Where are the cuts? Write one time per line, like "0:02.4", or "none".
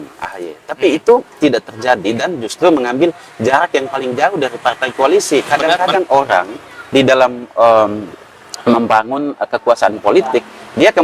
0:05.6